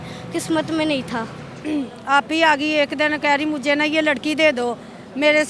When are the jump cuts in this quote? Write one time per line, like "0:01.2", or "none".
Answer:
0:01.4